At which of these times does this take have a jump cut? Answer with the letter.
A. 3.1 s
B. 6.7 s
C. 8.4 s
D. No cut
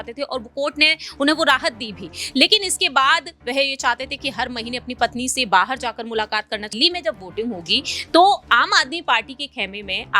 B